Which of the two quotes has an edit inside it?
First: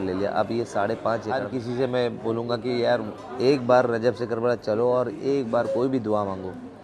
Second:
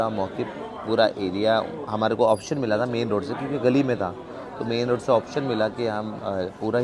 first; 1 cut; at 1.5 s

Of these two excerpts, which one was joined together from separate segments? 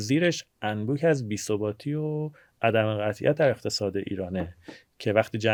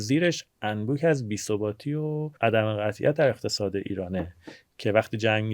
second; 1 cut; at 2.3 s

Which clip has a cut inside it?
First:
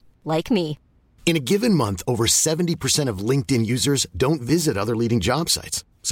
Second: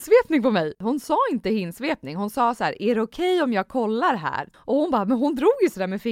second; 2 cuts; at 0.8 s, 4.5 s

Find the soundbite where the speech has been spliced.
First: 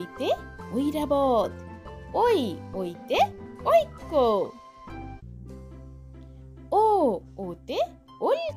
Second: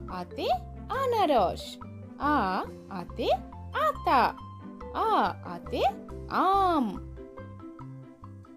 second; 1 cut; at 7.0 s

